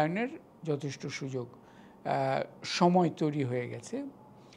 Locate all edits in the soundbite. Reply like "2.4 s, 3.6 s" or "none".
none

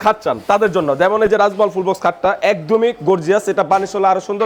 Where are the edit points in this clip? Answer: none

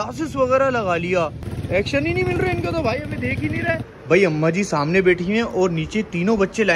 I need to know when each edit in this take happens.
1.5 s, 3.9 s

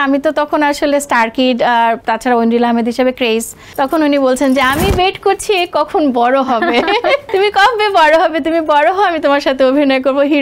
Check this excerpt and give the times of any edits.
2.0 s, 3.6 s, 7.3 s

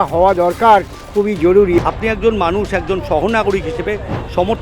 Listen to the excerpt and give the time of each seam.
1.8 s

